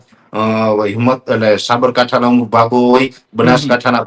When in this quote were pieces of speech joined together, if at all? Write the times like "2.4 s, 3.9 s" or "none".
none